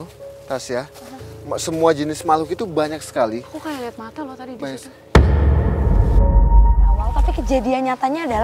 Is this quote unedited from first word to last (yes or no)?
no